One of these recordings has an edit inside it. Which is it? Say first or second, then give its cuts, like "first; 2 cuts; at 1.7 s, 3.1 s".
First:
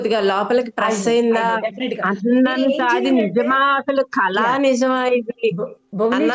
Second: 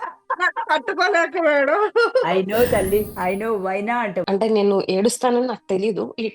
second; 1 cut; at 4.3 s